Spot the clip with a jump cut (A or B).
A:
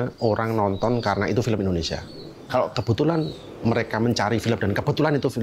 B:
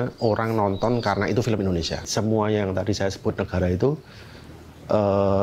B